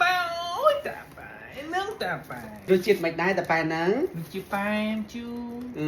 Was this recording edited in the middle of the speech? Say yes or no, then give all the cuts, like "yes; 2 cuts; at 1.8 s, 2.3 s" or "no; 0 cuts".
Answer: yes; 1 cut; at 2.7 s